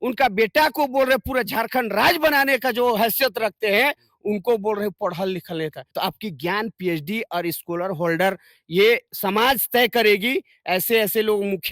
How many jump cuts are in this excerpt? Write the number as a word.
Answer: one